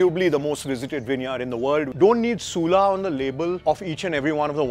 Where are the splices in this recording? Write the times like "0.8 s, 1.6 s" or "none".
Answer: 1.9 s, 3.6 s